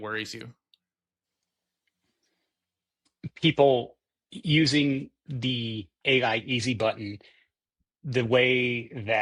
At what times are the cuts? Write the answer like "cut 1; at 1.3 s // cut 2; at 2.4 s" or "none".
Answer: none